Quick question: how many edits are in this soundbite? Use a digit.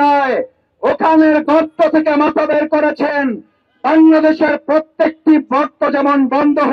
0